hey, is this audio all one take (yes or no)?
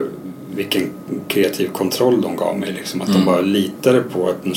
yes